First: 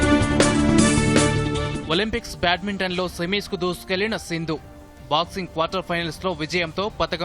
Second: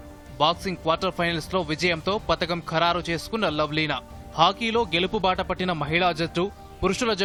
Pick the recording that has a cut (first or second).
first